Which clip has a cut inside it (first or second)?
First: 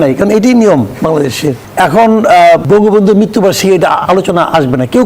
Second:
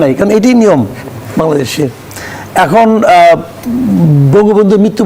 first